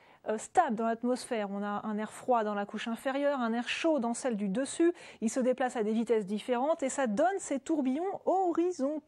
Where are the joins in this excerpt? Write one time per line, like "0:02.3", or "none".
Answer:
none